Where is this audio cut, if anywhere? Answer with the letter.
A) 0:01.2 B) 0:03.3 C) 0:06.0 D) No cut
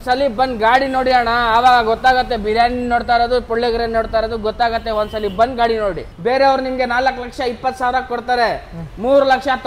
C